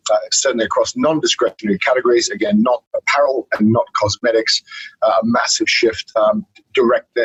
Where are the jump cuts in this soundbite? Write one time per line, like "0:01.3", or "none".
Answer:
none